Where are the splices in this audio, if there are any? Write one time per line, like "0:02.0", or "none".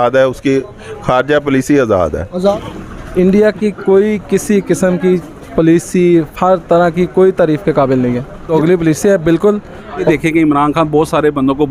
0:02.5
0:08.3
0:10.0